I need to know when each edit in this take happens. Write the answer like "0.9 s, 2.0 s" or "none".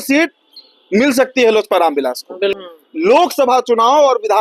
2.6 s